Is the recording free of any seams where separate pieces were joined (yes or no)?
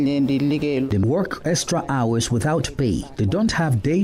no